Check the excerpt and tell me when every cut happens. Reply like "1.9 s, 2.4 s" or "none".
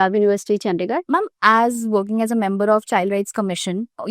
1.0 s

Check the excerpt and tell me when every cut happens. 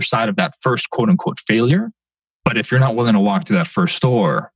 2.2 s

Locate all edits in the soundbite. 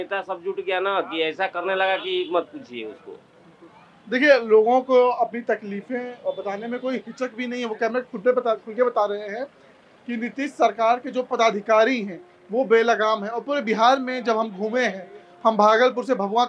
none

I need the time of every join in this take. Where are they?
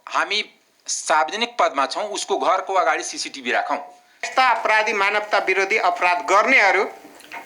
4.3 s

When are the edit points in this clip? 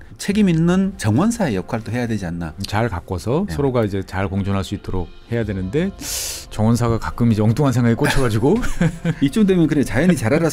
2.6 s, 3.5 s, 5.2 s, 9.2 s

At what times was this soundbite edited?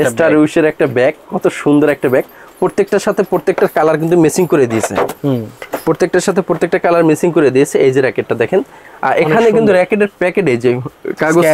none

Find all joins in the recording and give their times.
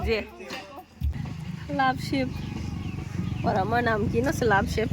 1.2 s

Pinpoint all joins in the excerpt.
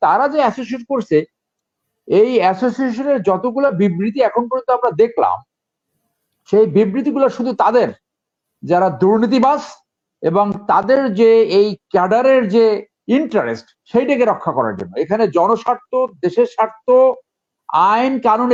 none

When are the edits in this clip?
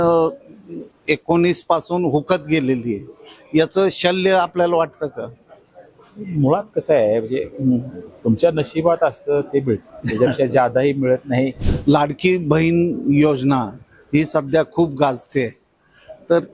11.6 s

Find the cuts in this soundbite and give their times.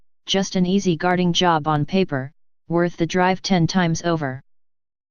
1.1 s

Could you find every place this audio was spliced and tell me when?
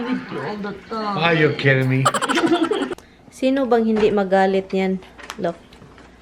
3.0 s

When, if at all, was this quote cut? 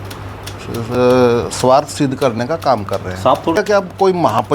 3.6 s

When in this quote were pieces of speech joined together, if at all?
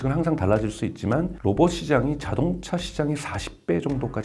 none

